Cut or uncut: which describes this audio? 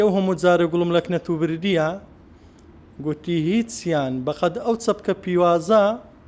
uncut